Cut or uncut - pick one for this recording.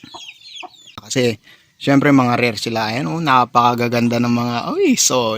cut